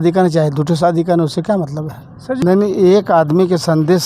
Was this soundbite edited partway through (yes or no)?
yes